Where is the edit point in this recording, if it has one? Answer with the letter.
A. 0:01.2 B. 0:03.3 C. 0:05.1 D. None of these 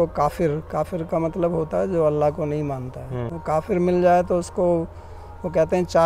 B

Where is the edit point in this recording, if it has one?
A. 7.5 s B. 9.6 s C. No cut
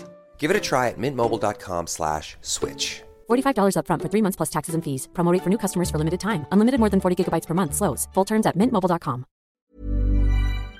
B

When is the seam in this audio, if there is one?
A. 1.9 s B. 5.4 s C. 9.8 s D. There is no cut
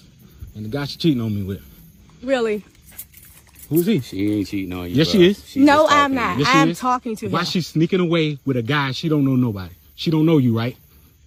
D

